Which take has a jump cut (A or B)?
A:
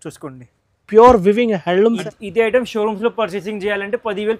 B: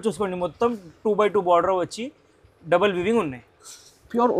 A